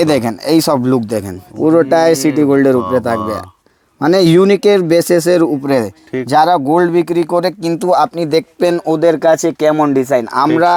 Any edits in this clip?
no; 0 cuts

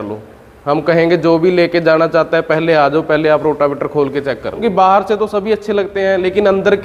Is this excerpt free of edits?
no; 1 cut; at 4.6 s

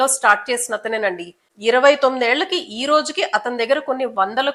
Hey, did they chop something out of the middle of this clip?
no; 0 cuts

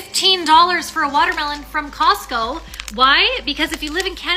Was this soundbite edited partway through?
no; 0 cuts

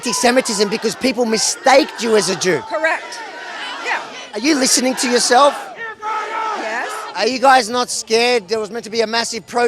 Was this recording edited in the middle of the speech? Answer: yes; 1 cut; at 7.0 s

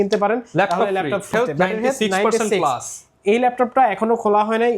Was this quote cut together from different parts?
yes; 1 cut; at 1.3 s

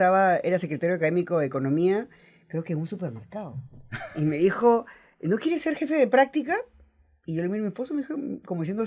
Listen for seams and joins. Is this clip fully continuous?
yes; 0 cuts

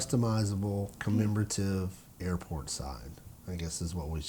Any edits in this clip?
yes; 1 cut; at 0.9 s

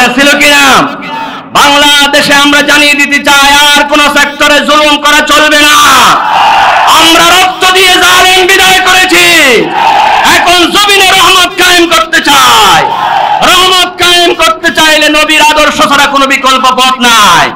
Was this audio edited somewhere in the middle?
no; 0 cuts

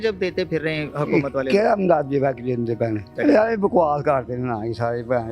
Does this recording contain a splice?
yes; 1 cut; at 3.1 s

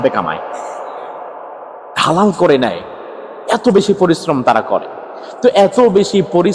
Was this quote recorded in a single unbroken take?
yes; 0 cuts

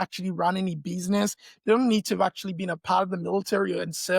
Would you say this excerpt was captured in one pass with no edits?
yes; 0 cuts

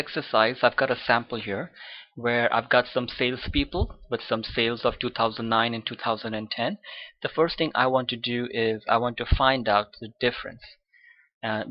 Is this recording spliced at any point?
yes; 1 cut; at 2.9 s

